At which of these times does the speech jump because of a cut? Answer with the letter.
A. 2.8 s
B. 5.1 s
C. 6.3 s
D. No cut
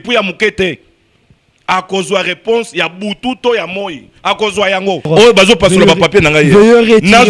B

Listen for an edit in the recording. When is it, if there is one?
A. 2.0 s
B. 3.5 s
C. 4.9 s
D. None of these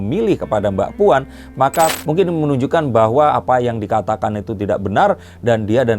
A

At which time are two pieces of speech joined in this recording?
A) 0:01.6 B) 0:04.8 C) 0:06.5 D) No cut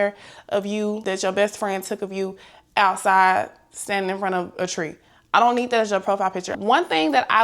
C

